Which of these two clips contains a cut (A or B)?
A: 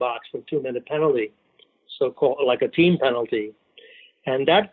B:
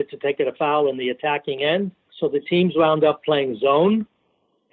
B